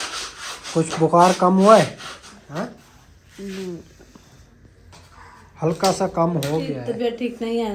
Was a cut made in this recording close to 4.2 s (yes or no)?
no